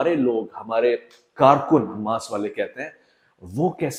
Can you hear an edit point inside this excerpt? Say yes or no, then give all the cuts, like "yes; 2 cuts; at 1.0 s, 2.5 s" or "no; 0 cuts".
no; 0 cuts